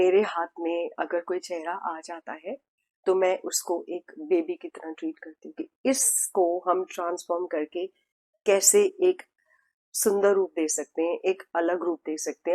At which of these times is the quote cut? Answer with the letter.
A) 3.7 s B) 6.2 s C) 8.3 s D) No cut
D